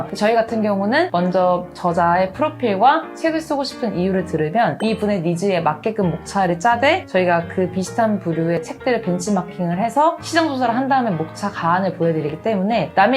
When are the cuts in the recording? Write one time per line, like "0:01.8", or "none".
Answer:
0:08.6

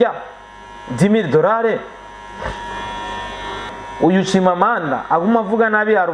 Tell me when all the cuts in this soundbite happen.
0:03.8

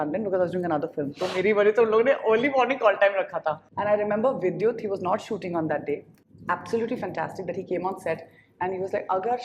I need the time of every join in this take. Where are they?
0:03.6

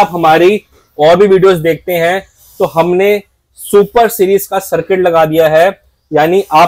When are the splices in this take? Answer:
none

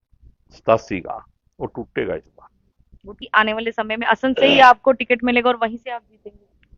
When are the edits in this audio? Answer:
0:03.2

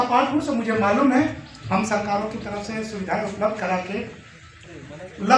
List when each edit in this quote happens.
none

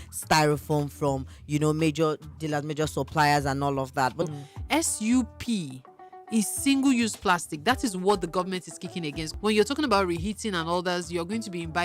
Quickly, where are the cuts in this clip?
0:04.2
0:09.2

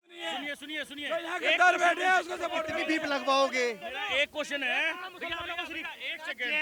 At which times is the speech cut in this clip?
none

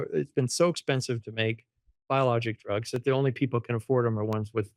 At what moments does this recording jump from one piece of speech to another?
none

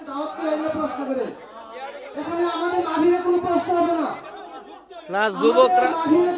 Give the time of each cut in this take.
0:02.0

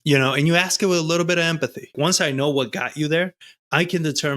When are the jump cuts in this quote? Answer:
0:01.9

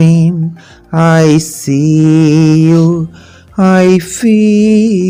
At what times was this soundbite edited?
none

